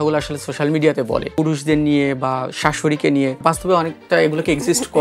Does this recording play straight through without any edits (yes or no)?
no